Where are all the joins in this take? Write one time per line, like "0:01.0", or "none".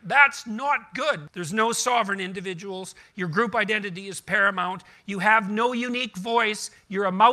0:01.3